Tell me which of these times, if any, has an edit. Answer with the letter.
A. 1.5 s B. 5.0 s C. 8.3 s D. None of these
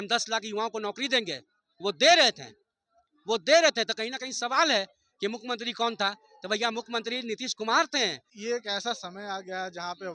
C